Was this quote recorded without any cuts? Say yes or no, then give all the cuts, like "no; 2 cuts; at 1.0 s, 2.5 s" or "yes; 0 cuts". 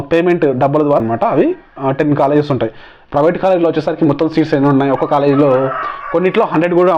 no; 1 cut; at 1.0 s